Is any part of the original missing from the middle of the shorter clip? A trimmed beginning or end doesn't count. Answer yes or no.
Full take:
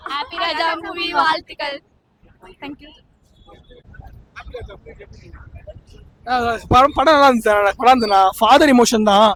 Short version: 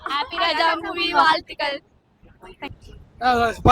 yes